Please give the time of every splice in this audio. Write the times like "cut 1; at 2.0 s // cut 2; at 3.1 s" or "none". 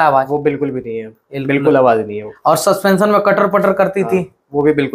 none